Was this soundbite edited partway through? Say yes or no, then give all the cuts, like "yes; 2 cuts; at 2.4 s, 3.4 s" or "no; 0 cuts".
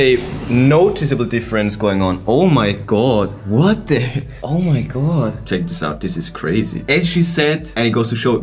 no; 0 cuts